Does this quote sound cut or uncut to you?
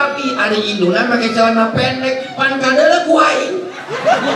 uncut